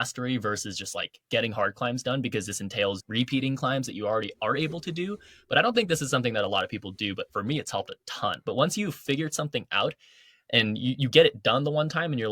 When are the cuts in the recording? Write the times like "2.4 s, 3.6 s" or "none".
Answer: 3.0 s, 8.4 s